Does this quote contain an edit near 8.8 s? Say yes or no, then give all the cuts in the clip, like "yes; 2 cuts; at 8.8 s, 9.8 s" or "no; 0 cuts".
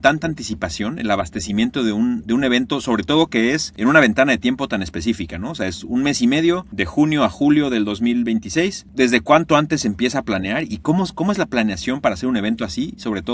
no; 0 cuts